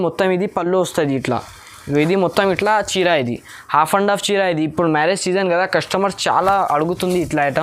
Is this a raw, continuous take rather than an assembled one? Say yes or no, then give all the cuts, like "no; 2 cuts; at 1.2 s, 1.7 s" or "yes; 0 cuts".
yes; 0 cuts